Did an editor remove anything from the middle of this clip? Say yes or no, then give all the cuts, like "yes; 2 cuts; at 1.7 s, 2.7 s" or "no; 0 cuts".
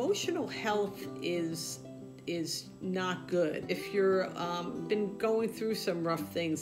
yes; 1 cut; at 3.7 s